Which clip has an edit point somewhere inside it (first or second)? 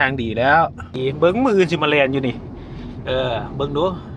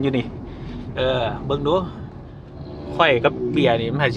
first